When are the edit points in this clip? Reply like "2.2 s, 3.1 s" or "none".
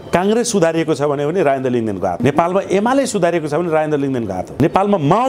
2.2 s, 4.5 s